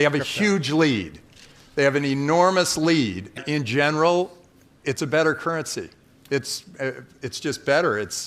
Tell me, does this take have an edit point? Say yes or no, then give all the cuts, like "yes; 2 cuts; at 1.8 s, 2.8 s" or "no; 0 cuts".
yes; 1 cut; at 3.4 s